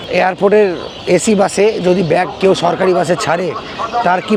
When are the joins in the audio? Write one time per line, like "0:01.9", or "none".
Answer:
none